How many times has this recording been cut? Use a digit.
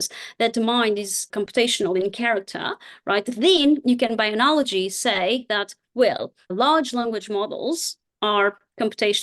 1